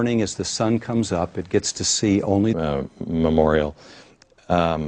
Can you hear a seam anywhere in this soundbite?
no; 0 cuts

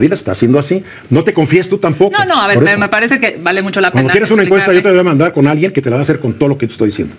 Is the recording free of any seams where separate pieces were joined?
yes; 0 cuts

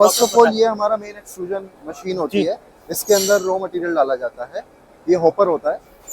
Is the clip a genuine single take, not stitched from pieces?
yes; 0 cuts

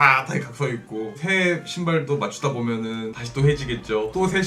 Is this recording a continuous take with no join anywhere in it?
no; 2 cuts; at 1.2 s, 3.2 s

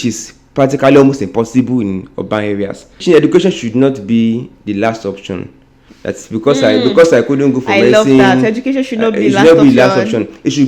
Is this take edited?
yes; 1 cut; at 3.0 s

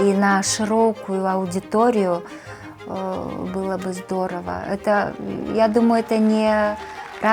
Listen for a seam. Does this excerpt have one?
no; 0 cuts

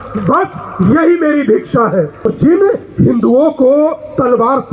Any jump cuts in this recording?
yes; 1 cut; at 2.3 s

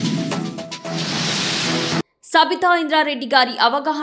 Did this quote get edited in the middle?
yes; 1 cut; at 2.1 s

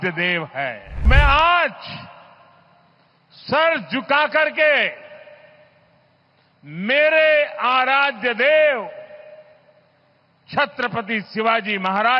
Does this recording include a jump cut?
yes; 1 cut; at 1.1 s

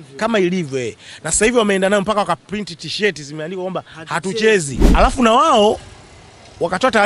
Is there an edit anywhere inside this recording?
yes; 1 cut; at 4.8 s

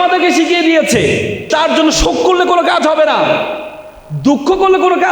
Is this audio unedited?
no; 1 cut; at 1.5 s

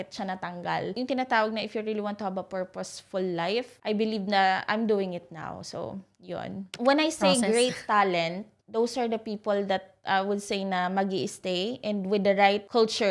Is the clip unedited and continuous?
no; 2 cuts; at 0.9 s, 6.7 s

